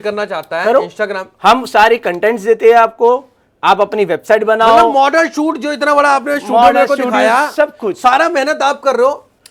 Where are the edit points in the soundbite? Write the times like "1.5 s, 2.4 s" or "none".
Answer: none